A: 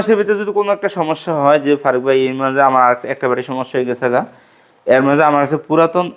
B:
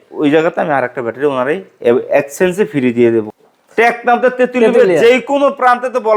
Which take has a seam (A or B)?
B